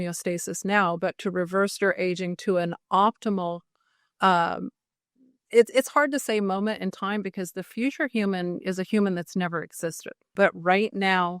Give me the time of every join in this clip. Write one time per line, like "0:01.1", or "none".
0:10.3